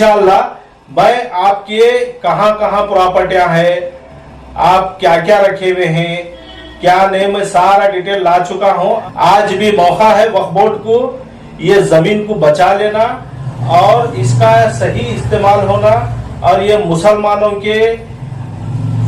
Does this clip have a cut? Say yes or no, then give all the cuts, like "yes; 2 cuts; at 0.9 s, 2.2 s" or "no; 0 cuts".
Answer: yes; 1 cut; at 9.0 s